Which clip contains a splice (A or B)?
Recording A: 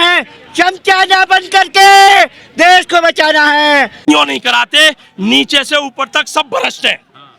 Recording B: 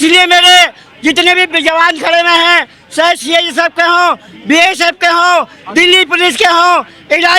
A